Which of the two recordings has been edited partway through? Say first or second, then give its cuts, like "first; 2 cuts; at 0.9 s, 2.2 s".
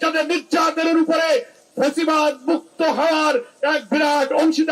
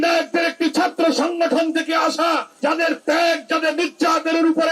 second; 1 cut; at 2.5 s